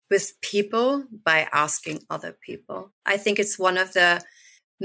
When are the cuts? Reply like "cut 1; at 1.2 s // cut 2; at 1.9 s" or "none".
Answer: cut 1; at 2.9 s

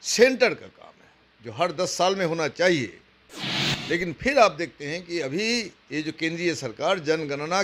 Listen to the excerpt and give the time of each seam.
none

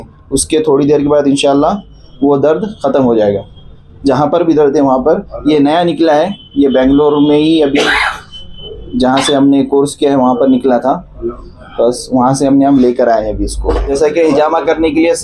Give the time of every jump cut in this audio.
cut 1; at 13.8 s

